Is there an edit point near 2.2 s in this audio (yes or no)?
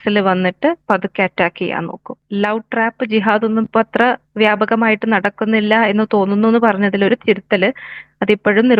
yes